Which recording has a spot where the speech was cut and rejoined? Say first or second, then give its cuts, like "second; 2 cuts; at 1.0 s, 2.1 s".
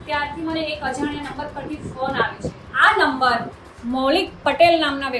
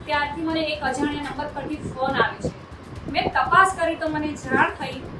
first; 1 cut; at 2.6 s